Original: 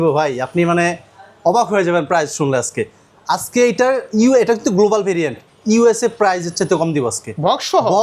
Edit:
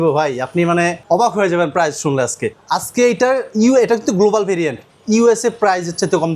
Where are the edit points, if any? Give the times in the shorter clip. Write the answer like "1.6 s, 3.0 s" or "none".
1.0 s, 2.5 s